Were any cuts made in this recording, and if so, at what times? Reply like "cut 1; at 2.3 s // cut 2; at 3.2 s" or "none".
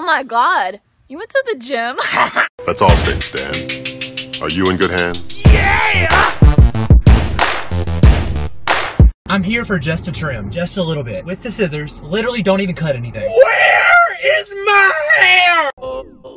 cut 1; at 1.0 s